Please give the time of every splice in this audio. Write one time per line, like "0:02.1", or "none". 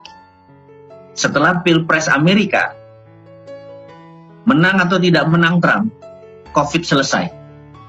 none